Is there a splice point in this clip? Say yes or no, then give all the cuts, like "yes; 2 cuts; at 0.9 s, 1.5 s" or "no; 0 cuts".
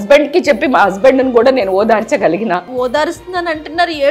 yes; 1 cut; at 2.7 s